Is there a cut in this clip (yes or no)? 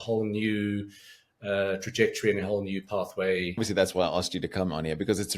yes